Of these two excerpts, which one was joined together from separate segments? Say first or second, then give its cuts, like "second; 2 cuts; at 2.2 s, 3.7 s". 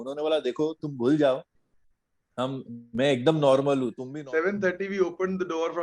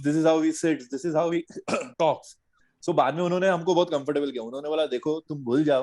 first; 1 cut; at 4.1 s